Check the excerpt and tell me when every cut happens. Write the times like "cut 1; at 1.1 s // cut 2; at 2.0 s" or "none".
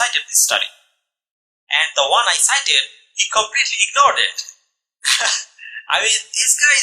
none